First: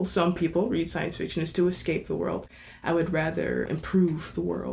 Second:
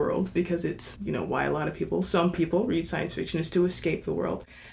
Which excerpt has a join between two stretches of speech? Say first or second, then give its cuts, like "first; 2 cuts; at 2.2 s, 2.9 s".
first; 1 cut; at 3.7 s